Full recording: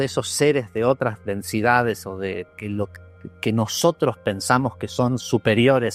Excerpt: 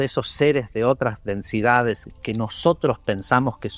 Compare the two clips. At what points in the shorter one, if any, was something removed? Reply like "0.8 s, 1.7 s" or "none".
2.1 s